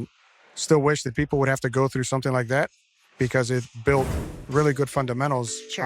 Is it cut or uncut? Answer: uncut